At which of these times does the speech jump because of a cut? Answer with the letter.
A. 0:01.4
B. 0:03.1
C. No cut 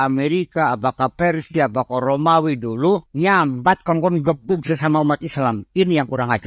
B